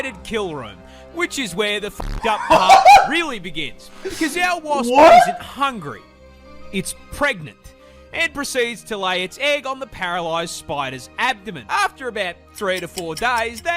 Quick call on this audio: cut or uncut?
uncut